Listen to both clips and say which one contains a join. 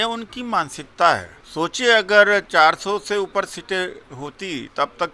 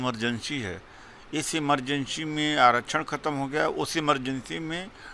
first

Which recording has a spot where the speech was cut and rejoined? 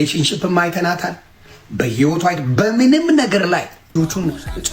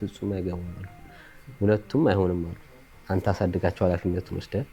first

